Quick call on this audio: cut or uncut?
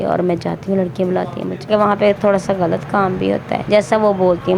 cut